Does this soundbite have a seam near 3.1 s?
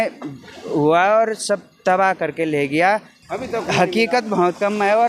yes; 1 cut; at 3.1 s

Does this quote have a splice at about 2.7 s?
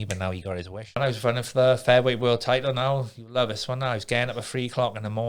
no; 1 cut; at 1.0 s

